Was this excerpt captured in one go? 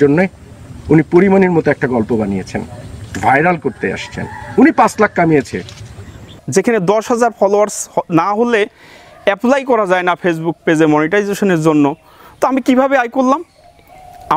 no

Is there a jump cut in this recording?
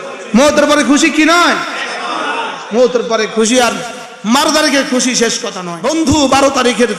yes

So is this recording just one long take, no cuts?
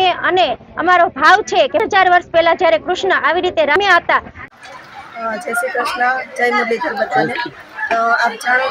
no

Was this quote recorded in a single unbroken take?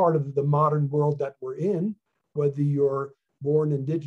yes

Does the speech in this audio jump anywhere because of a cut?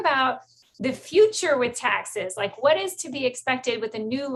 no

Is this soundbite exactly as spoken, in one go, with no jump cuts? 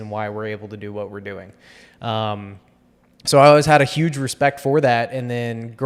yes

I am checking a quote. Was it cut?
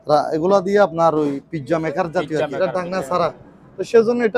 yes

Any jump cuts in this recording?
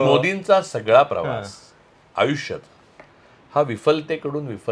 no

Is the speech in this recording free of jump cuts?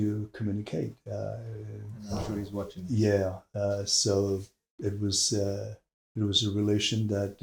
yes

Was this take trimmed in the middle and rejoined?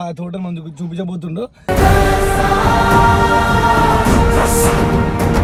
no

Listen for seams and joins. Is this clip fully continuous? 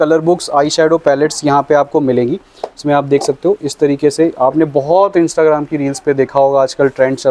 yes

